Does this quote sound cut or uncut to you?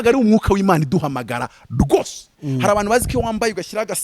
cut